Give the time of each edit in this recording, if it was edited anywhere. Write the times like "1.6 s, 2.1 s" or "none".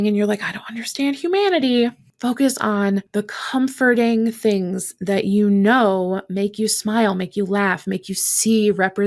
2.1 s, 3.1 s